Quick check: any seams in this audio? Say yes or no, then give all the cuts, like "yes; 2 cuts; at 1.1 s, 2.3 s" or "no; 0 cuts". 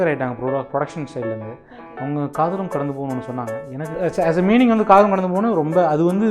yes; 1 cut; at 3.9 s